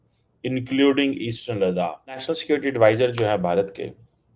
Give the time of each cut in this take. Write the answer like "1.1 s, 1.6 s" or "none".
2.2 s